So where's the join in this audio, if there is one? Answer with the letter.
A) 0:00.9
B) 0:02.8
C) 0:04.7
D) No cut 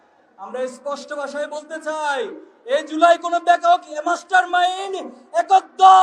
D